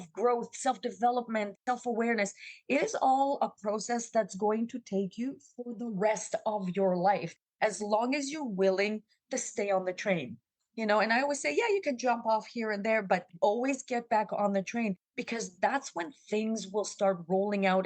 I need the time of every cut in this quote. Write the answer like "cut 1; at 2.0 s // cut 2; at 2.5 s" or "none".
cut 1; at 15.1 s